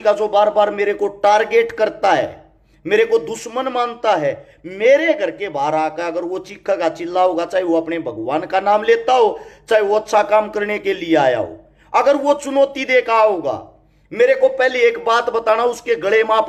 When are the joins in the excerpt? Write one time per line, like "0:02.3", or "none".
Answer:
none